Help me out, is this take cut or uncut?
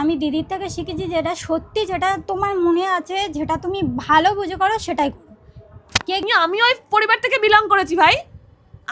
cut